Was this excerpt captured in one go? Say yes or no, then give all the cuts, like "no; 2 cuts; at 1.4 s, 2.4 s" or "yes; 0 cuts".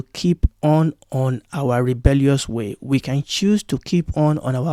yes; 0 cuts